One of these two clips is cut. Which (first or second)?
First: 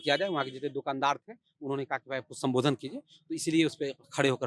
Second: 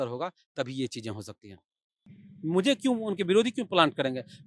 second